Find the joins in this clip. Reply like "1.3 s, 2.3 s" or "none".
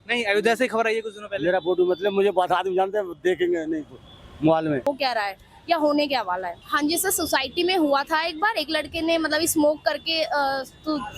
4.9 s